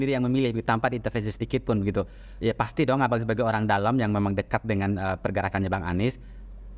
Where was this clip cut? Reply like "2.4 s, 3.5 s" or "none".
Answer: none